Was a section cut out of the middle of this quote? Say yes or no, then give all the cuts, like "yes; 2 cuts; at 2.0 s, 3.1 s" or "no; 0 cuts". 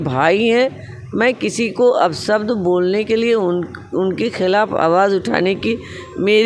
no; 0 cuts